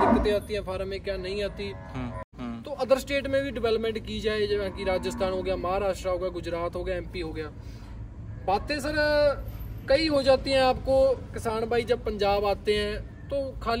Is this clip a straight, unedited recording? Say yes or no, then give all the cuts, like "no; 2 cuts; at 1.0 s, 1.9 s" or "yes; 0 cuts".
no; 1 cut; at 2.3 s